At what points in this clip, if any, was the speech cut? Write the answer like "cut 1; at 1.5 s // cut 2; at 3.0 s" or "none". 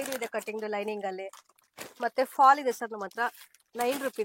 none